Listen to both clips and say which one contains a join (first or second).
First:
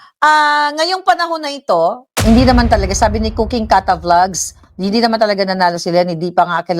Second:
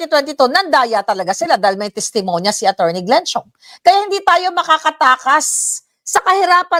first